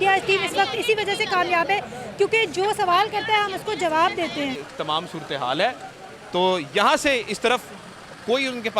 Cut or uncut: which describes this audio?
cut